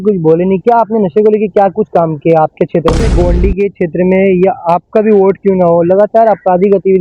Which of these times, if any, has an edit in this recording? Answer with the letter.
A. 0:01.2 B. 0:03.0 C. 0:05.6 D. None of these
B